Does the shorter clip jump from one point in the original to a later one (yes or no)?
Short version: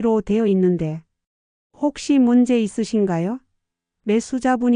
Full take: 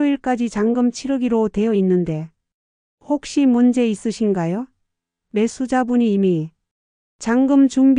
no